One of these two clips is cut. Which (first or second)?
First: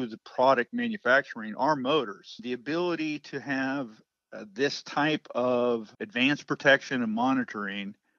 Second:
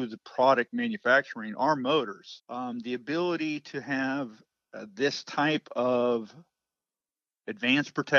first